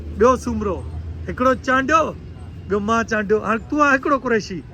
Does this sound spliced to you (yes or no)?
no